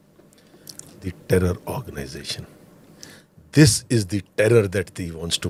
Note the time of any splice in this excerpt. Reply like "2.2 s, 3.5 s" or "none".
none